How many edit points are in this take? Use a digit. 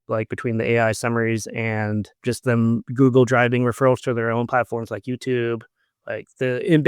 1